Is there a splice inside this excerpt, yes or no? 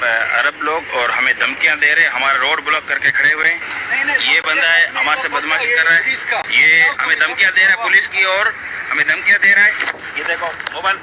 yes